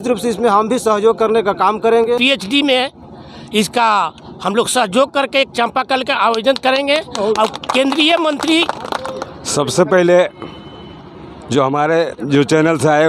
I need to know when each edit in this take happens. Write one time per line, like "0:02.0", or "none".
0:02.2
0:09.2